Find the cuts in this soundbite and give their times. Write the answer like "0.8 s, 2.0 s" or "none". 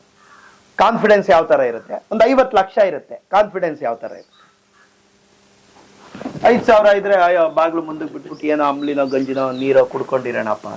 none